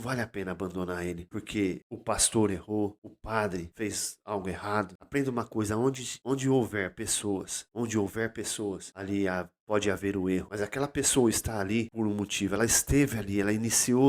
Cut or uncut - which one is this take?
cut